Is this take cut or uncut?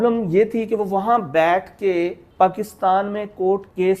cut